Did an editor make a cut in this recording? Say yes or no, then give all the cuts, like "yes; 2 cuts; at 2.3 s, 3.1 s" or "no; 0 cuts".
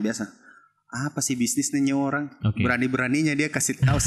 no; 0 cuts